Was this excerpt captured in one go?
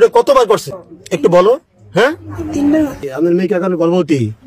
no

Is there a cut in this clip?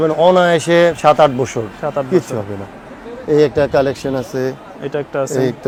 no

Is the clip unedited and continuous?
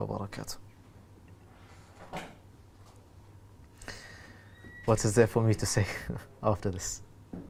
yes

